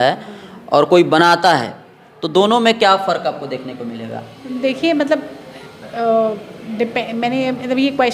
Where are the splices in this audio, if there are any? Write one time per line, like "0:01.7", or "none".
none